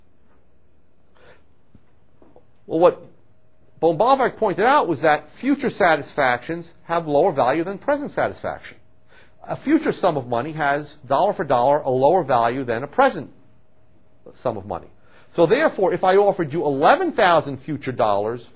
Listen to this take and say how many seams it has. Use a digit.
1